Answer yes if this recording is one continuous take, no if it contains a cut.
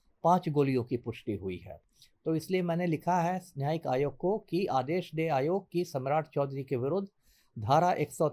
yes